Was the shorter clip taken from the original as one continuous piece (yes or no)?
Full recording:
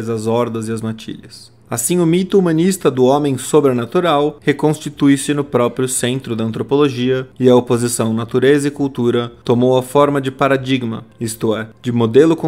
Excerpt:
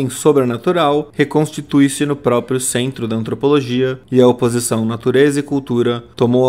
yes